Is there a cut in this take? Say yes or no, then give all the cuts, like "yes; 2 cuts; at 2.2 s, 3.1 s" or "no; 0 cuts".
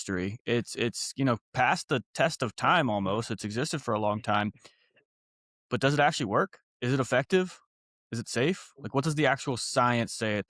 no; 0 cuts